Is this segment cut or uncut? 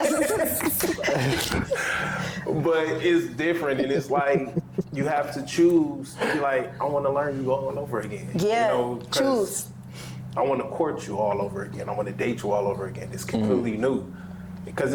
uncut